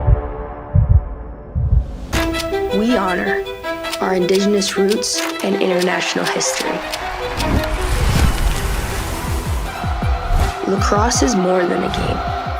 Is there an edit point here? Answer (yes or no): yes